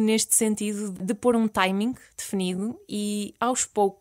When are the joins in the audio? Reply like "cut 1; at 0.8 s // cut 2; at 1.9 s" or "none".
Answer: cut 1; at 1.0 s